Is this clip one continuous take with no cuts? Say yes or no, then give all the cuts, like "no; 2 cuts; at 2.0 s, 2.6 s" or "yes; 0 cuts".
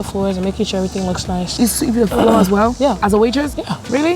no; 1 cut; at 1.5 s